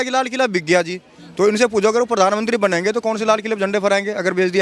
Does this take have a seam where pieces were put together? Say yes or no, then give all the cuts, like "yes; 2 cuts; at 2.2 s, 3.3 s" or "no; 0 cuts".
no; 0 cuts